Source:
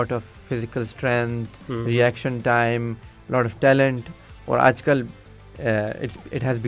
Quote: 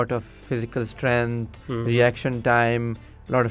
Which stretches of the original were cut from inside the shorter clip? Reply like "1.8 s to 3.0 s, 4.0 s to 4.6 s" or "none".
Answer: none